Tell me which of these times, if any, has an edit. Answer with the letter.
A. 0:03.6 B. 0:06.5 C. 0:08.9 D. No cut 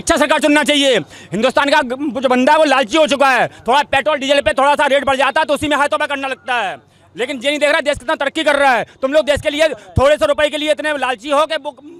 D